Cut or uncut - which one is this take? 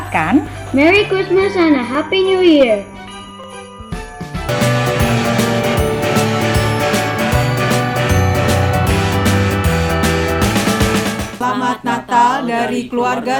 uncut